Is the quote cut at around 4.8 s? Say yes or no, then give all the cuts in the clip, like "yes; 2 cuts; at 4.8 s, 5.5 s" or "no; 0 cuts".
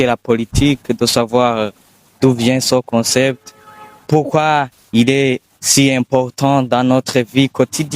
yes; 1 cut; at 4.8 s